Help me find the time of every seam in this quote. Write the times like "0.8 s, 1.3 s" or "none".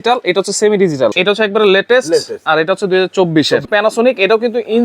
1.1 s, 3.7 s